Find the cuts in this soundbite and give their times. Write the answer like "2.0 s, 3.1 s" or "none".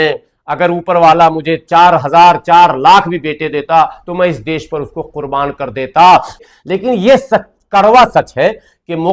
6.4 s